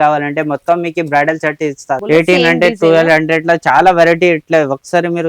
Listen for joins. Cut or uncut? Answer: cut